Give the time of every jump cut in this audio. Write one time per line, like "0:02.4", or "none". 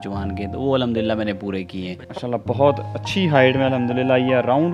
0:02.2